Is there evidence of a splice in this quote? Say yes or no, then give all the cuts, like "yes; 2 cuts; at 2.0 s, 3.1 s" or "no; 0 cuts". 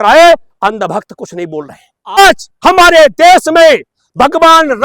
yes; 1 cut; at 2.2 s